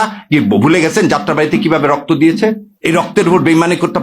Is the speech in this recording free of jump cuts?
no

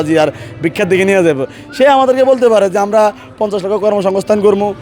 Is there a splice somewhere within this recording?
no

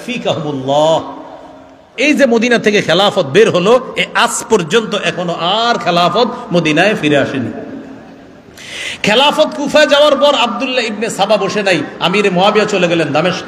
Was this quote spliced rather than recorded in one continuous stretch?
yes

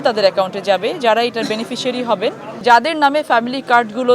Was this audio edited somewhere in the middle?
yes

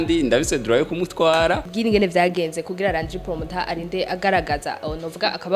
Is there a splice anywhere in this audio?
yes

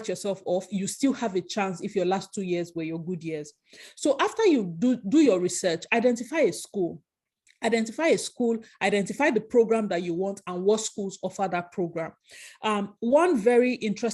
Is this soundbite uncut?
yes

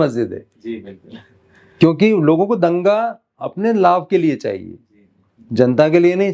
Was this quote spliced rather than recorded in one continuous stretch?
no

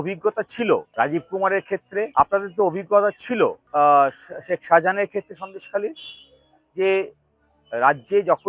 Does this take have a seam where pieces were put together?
yes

